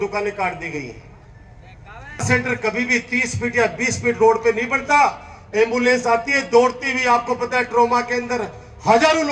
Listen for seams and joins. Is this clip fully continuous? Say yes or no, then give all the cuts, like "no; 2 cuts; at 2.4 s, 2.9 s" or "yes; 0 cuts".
no; 1 cut; at 2.2 s